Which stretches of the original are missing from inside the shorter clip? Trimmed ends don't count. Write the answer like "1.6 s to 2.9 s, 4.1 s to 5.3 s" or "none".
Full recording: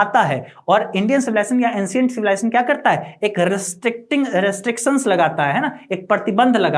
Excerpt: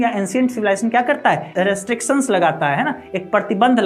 3.1 s to 4.3 s